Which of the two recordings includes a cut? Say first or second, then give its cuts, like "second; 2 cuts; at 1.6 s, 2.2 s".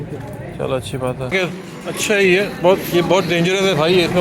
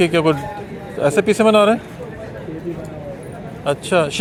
first; 1 cut; at 1.3 s